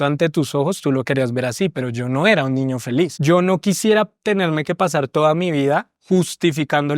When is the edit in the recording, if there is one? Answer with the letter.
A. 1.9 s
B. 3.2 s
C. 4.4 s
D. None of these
B